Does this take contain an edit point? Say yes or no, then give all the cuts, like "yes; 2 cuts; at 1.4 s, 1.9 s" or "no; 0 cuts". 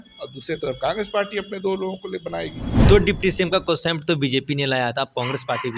yes; 1 cut; at 2.8 s